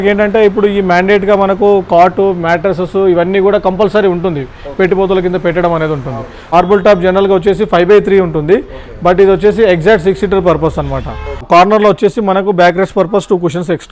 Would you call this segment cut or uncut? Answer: cut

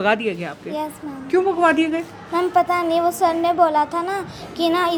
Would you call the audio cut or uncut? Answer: uncut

